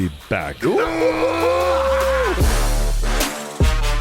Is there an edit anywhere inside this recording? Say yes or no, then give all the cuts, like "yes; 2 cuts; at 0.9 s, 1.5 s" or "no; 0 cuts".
yes; 1 cut; at 2.4 s